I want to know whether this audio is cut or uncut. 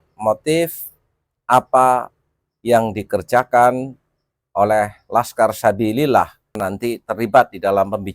cut